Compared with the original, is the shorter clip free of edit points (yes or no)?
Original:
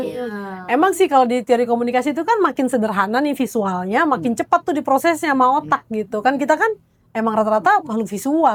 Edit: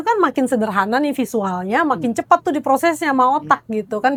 yes